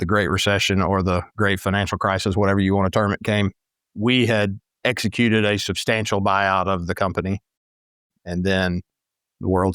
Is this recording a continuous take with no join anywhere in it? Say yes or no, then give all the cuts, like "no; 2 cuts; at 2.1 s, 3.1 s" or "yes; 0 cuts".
yes; 0 cuts